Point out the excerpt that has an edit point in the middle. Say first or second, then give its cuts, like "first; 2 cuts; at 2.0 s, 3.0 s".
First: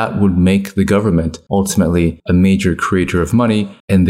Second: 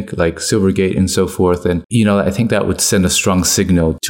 first; 2 cuts; at 1.4 s, 2.2 s